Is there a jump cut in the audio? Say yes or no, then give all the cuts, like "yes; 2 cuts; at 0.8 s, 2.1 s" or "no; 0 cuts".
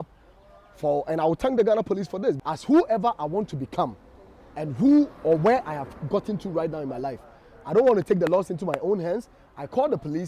yes; 1 cut; at 2.4 s